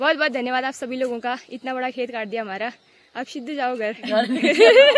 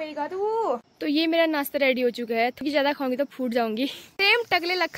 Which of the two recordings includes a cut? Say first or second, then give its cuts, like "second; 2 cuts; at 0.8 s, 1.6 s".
second; 3 cuts; at 0.9 s, 2.6 s, 3.9 s